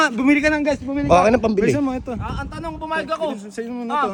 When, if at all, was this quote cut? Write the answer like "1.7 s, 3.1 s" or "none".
none